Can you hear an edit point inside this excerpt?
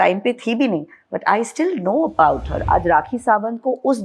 yes; 1 cut; at 2.5 s

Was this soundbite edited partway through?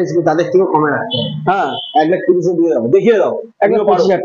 no; 0 cuts

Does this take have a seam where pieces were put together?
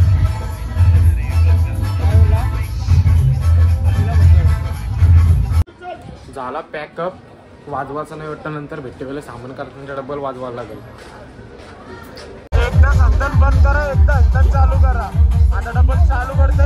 no; 0 cuts

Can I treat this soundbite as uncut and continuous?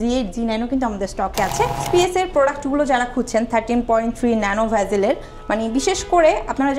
no; 1 cut; at 1.8 s

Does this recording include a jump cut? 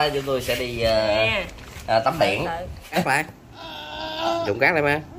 yes; 1 cut; at 3.0 s

